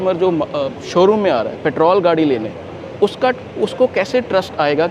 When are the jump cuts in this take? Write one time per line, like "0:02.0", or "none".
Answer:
none